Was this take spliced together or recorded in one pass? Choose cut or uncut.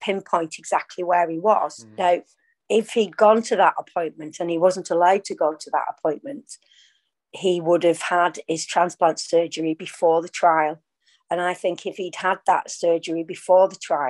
cut